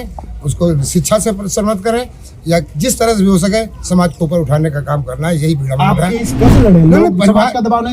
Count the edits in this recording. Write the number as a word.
one